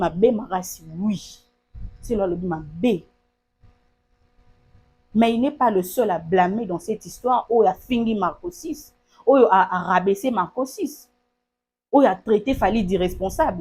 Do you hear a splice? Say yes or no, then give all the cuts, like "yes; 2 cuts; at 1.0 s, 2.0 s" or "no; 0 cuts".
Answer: no; 0 cuts